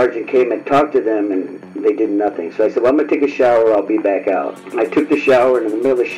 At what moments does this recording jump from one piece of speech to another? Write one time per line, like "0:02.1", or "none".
0:04.6